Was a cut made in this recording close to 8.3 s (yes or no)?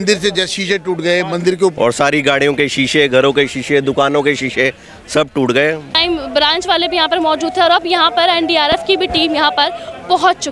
no